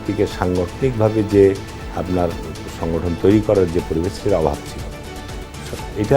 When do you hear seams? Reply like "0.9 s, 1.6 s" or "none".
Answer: none